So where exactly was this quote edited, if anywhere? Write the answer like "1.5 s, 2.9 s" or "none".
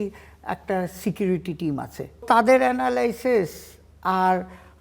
2.2 s